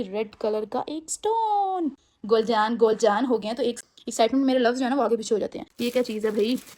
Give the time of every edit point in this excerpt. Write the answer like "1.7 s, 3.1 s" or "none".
2.1 s, 3.8 s, 5.6 s